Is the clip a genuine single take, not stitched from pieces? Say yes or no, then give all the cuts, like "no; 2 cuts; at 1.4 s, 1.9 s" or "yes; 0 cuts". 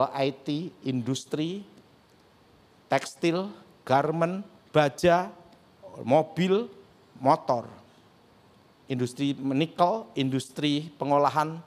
yes; 0 cuts